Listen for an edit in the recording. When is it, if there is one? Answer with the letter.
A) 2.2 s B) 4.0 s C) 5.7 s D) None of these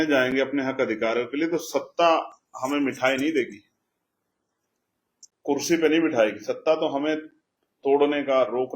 D